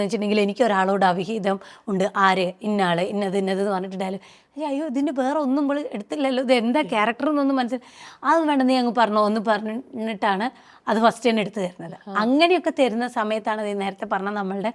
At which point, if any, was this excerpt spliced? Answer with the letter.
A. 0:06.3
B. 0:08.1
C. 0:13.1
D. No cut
D